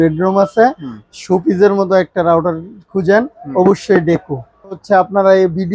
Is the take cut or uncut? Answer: cut